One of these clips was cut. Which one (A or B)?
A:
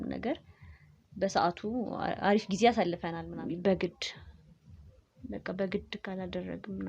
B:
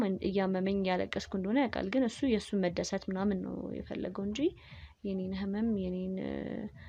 A